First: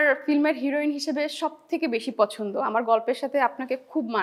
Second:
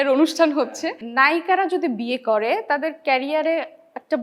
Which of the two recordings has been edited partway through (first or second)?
second